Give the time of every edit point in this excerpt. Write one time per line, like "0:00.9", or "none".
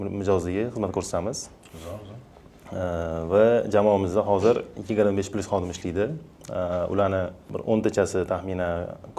none